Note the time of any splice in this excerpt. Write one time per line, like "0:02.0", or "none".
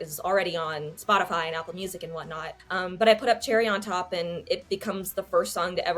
0:02.6